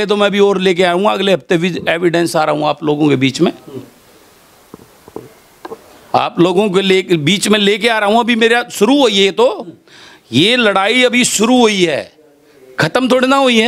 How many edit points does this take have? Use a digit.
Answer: 0